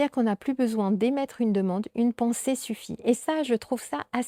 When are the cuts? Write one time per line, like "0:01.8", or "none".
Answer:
none

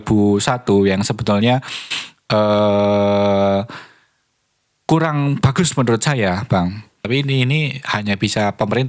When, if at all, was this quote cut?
0:07.1

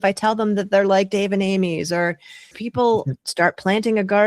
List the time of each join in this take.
0:02.6

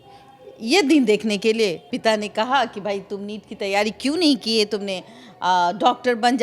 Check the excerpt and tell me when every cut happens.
0:01.9

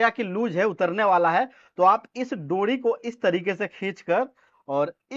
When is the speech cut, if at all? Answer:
none

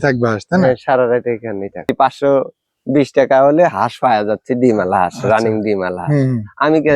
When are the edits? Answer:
0:01.9

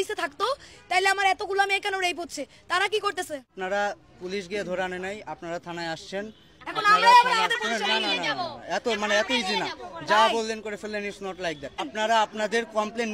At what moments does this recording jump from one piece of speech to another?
0:03.5
0:11.9

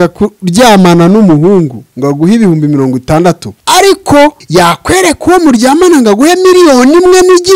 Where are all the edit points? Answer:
0:03.5
0:04.4

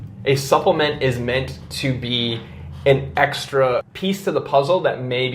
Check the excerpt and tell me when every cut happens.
0:03.9

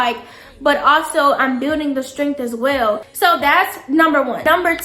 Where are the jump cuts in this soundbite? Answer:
none

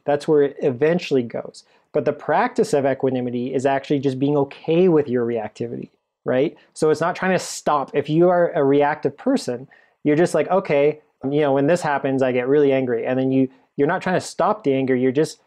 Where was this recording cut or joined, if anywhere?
0:11.3

